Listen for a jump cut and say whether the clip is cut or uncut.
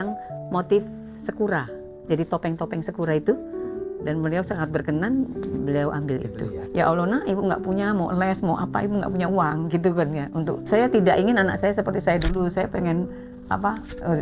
cut